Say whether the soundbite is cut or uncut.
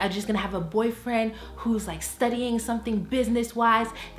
uncut